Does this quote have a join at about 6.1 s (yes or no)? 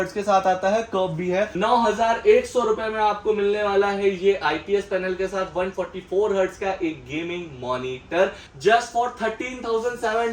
no